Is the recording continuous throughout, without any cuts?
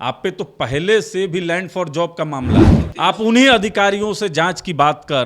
no; 1 cut; at 2.8 s

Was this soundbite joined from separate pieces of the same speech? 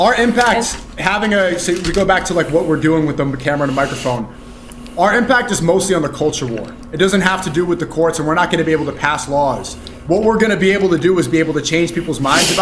no; 0 cuts

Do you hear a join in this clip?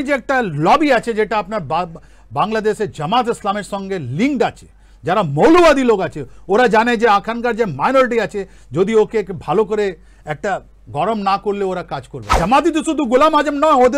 yes; 1 cut; at 12.2 s

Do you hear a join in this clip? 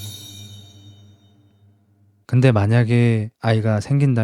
yes; 2 cuts; at 2.1 s, 3.3 s

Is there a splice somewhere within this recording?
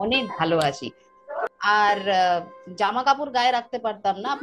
yes; 1 cut; at 1.1 s

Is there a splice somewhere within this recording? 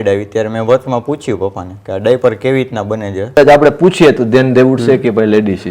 yes; 1 cut; at 3.4 s

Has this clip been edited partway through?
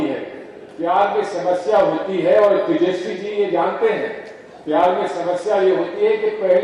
no; 0 cuts

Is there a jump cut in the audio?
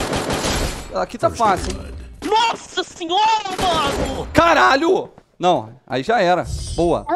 no; 0 cuts

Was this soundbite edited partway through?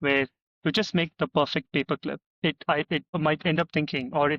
yes; 2 cuts; at 2.3 s, 3.1 s

